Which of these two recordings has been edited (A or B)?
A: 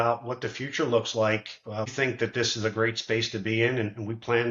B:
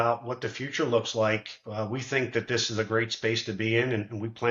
A